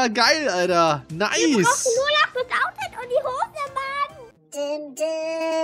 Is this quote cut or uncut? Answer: cut